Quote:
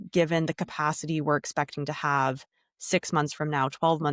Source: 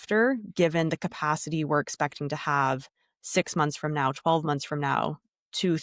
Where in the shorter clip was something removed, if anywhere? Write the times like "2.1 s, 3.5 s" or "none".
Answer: none